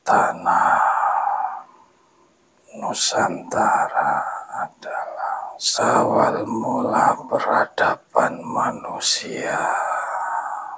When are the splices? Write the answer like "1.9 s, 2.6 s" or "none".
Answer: 5.7 s